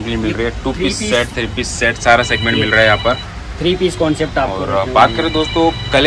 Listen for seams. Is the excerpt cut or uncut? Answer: uncut